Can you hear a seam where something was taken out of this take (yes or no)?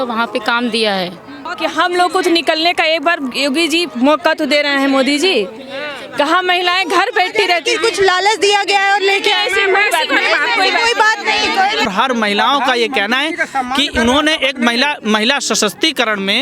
yes